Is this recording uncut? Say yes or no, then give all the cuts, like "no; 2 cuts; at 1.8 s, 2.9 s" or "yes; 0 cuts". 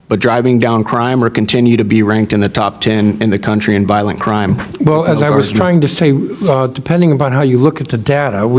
yes; 0 cuts